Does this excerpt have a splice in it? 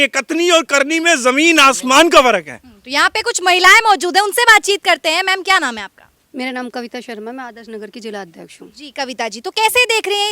no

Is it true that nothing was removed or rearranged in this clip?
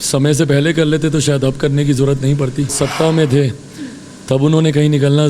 no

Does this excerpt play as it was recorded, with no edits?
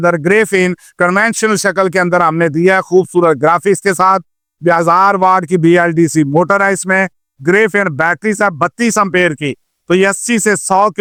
yes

